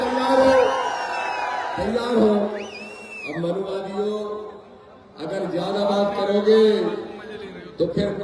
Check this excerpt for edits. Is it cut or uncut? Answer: uncut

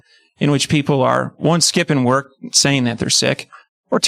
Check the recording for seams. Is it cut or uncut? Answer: uncut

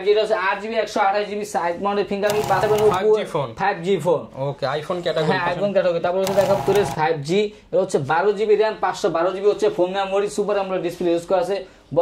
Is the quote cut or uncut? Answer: cut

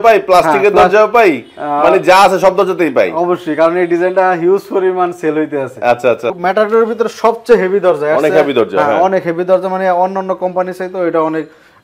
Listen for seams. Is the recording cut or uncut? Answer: cut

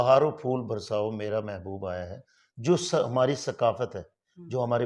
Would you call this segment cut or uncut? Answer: uncut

